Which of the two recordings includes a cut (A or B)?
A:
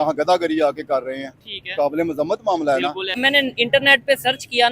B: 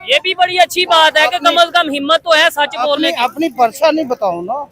A